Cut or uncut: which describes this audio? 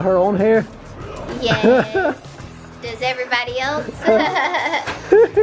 uncut